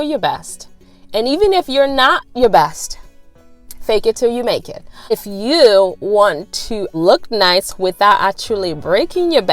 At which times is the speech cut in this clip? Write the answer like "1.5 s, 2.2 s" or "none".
4.9 s, 6.8 s